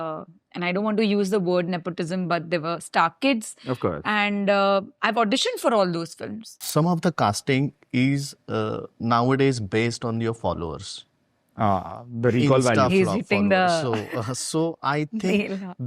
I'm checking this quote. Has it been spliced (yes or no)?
yes